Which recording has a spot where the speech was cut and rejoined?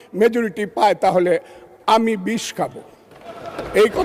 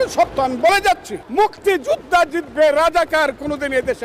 second; 1 cut; at 1.2 s

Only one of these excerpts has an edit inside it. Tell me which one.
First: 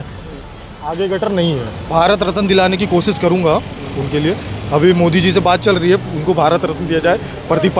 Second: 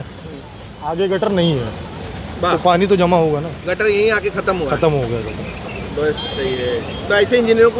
first; 1 cut; at 1.8 s

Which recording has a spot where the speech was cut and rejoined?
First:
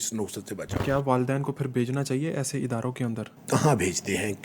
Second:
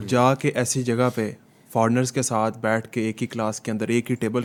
first; 2 cuts; at 0.8 s, 3.3 s

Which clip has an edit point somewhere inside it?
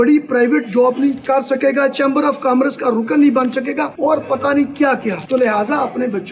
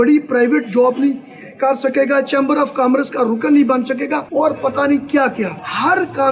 first; 2 cuts; at 1.2 s, 5.2 s

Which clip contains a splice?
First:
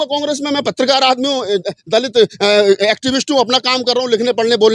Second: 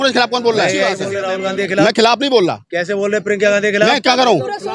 second; 1 cut; at 1.1 s

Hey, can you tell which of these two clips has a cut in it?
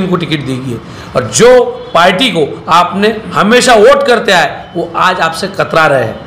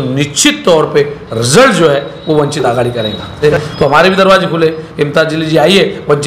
second; 1 cut; at 3.4 s

